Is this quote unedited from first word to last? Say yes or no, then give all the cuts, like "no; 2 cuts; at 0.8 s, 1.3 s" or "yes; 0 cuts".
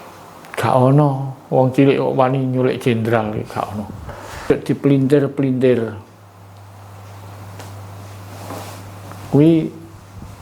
no; 1 cut; at 4.5 s